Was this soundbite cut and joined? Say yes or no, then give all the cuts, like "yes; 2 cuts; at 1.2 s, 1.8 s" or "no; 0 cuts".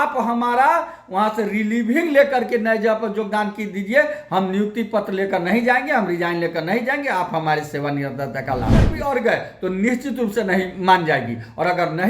yes; 1 cut; at 8.9 s